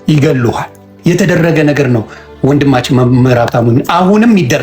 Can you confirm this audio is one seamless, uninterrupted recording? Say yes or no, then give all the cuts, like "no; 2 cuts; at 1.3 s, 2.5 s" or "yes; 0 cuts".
no; 1 cut; at 0.9 s